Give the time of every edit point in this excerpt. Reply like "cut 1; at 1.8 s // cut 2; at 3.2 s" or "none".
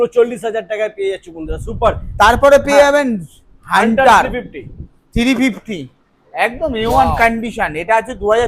none